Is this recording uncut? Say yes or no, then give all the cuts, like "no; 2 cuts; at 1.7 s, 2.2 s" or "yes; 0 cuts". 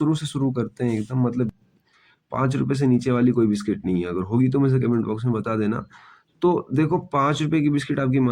no; 1 cut; at 1.5 s